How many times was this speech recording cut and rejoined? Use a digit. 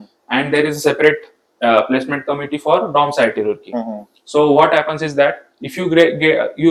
0